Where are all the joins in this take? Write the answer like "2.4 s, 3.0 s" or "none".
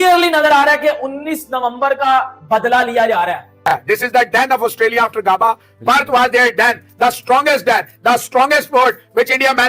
3.6 s